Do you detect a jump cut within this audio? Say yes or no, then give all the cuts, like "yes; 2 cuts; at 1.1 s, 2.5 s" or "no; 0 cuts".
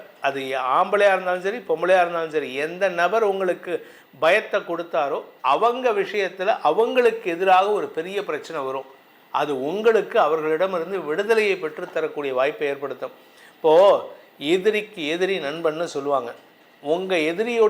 no; 0 cuts